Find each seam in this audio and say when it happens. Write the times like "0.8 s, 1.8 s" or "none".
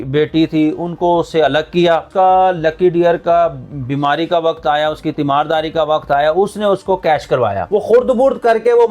2.1 s, 7.6 s